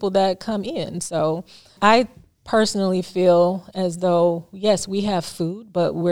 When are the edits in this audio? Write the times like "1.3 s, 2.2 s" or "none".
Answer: 1.7 s